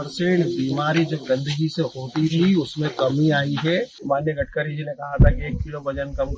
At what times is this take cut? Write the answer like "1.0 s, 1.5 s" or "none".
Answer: 4.0 s